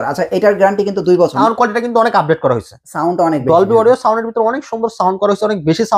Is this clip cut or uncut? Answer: cut